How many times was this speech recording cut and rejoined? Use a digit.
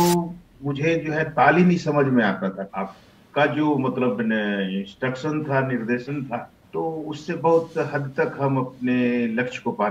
2